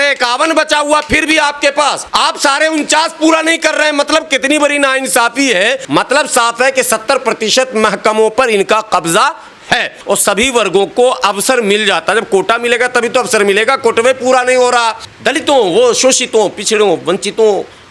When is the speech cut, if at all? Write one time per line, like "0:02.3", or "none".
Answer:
0:05.8
0:10.0
0:15.1